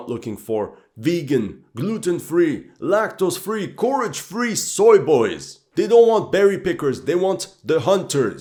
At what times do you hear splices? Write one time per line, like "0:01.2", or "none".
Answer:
none